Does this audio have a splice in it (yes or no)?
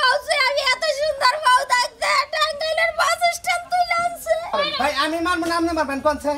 yes